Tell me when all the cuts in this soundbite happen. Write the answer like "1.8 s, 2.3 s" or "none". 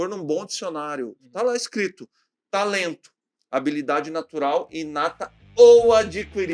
1.2 s